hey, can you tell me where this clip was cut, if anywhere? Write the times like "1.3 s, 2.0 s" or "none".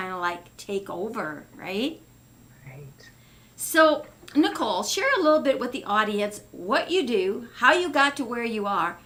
none